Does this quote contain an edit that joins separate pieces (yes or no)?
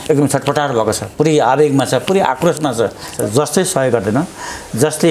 yes